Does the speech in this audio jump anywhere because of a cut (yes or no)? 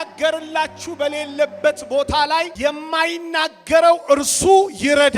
yes